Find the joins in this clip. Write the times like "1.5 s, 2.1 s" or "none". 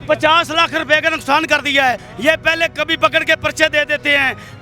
2.1 s